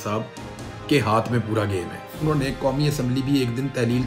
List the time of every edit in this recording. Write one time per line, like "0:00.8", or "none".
0:02.2